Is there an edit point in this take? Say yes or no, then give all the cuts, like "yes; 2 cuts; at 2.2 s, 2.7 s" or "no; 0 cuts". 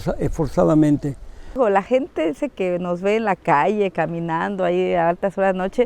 yes; 1 cut; at 1.6 s